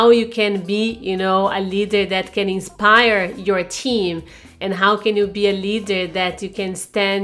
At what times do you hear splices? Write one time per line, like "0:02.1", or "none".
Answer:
none